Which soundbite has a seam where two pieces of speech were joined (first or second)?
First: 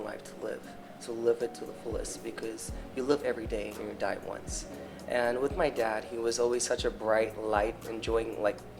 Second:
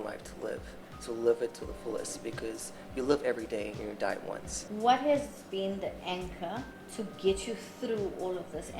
second